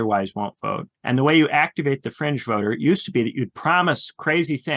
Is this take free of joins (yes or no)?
no